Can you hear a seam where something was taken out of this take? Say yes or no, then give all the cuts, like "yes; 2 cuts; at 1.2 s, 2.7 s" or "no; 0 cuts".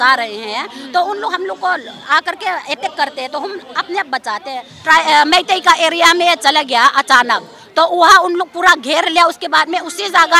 yes; 1 cut; at 4.7 s